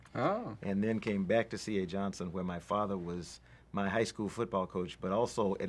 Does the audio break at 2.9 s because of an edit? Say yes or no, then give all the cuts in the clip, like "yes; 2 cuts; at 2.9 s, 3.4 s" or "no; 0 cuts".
yes; 1 cut; at 2.9 s